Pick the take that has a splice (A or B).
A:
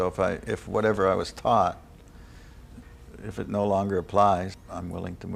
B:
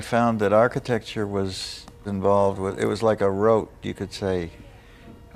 B